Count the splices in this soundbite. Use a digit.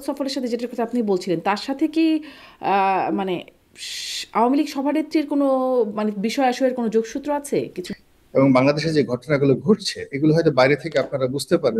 1